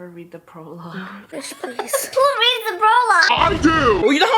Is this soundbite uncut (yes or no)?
yes